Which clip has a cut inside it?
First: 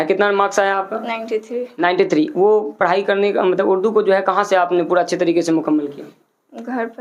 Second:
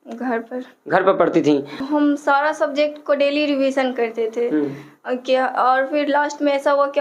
second; 1 cut; at 1.8 s

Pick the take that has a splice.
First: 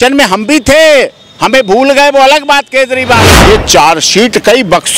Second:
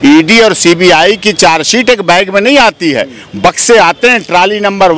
first; 1 cut; at 3.3 s

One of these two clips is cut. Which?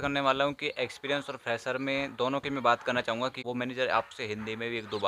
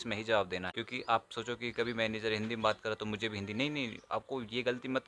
first; 1 cut; at 3.4 s

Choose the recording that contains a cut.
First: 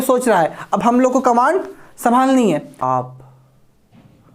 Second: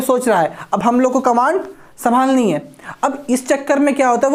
first; 1 cut; at 2.7 s

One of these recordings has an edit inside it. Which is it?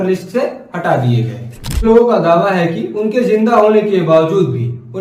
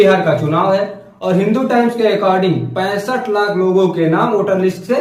first; 1 cut; at 1.8 s

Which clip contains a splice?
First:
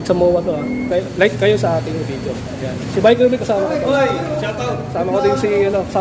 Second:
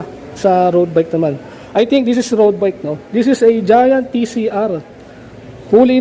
first; 1 cut; at 1.3 s

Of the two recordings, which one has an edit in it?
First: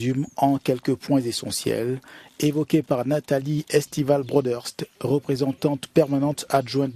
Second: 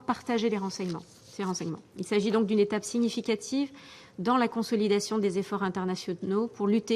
second; 1 cut; at 1.4 s

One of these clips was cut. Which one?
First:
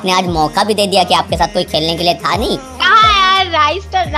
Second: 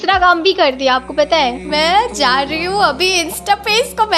second; 1 cut; at 1.6 s

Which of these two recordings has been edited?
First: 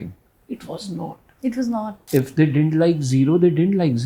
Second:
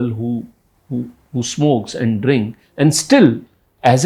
first; 1 cut; at 2.0 s

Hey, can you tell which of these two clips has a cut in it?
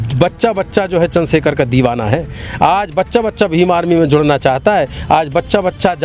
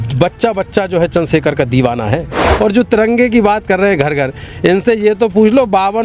second; 1 cut; at 2.4 s

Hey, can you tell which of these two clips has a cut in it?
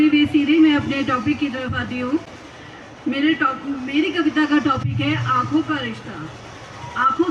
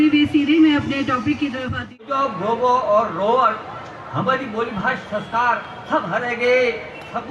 second; 1 cut; at 2.0 s

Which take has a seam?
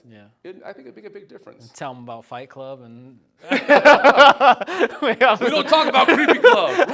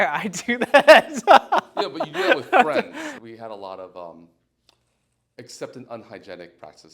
second; 1 cut; at 3.1 s

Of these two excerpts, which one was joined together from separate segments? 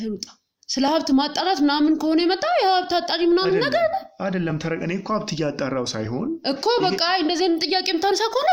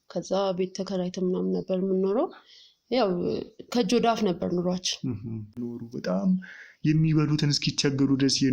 second; 1 cut; at 5.6 s

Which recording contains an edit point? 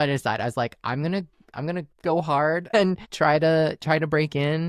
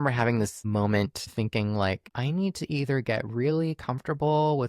second; 2 cuts; at 1.3 s, 2.1 s

